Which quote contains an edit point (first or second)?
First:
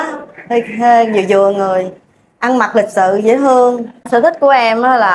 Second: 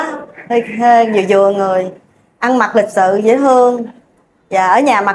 first